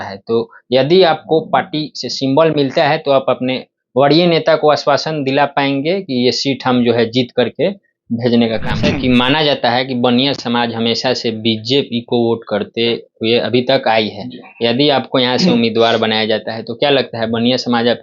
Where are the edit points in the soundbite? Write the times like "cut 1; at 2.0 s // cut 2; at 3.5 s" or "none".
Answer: cut 1; at 8.8 s